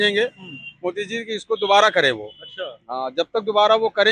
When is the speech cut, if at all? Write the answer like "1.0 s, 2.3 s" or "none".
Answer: none